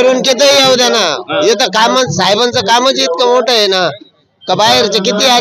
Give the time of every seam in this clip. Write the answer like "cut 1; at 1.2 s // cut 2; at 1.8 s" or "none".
none